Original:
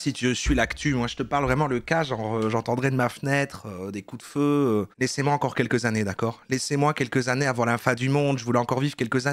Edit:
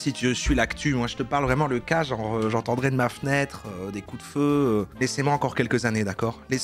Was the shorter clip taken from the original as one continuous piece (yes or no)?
yes